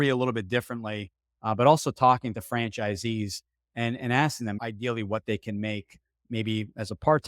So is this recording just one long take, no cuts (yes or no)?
yes